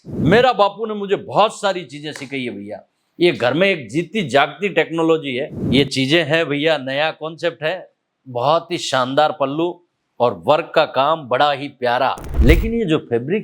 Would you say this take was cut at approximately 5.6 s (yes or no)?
yes